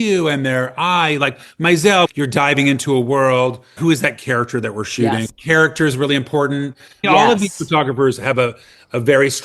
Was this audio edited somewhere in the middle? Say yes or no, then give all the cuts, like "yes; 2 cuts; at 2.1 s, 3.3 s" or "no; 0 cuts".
yes; 4 cuts; at 2.1 s, 3.7 s, 5.3 s, 7.1 s